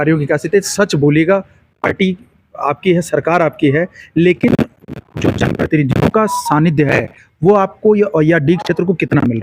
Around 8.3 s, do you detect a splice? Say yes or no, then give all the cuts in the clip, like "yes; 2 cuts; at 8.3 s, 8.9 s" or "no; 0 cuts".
no; 0 cuts